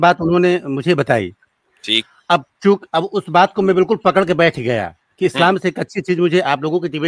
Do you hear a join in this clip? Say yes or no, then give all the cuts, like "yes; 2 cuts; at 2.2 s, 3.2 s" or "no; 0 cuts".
no; 0 cuts